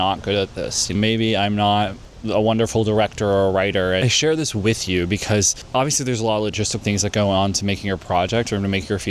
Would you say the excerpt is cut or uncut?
cut